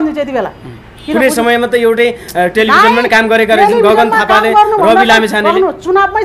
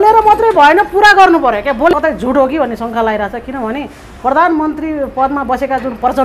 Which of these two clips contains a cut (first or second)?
second